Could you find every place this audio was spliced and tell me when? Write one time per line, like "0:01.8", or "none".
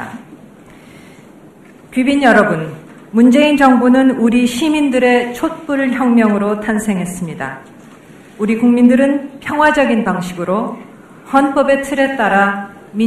0:07.1